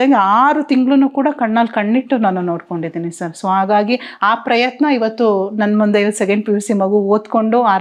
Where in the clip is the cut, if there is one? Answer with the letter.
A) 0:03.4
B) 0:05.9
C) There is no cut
C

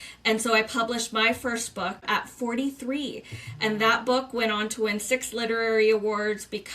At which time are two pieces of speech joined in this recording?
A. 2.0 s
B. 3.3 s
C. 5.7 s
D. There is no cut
A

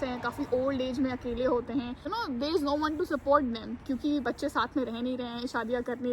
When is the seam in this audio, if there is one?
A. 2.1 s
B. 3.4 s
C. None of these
A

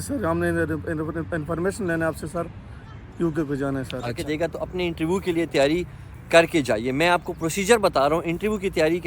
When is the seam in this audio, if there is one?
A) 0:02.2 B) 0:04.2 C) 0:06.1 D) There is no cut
B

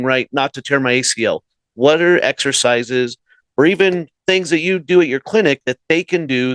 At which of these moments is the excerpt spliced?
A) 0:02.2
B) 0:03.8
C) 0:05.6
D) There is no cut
B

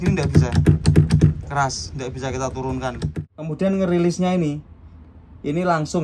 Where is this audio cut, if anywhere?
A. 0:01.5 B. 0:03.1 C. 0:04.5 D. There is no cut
B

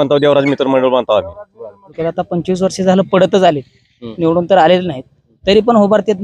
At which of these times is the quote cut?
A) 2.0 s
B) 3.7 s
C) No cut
A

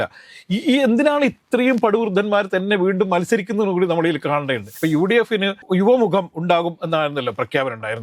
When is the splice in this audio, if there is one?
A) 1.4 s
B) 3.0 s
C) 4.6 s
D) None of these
C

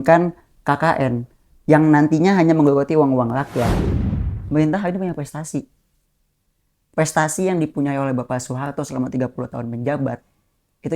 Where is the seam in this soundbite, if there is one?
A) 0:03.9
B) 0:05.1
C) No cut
A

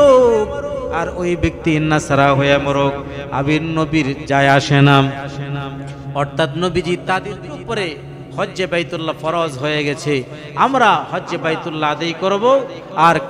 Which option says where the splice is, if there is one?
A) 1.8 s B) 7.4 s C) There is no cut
B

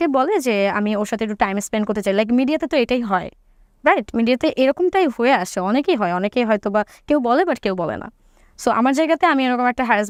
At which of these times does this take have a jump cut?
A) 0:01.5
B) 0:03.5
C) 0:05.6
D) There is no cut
D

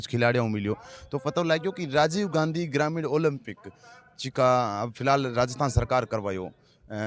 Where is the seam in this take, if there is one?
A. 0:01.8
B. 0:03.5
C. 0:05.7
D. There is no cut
D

